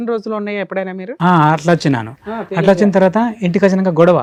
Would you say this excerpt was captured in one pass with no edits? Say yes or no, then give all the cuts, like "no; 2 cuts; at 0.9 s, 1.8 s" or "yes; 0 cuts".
yes; 0 cuts